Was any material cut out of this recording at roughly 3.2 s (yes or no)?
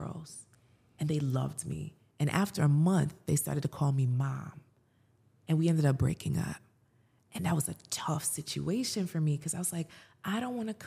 no